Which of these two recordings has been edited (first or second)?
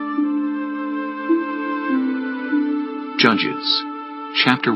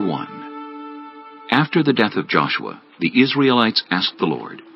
second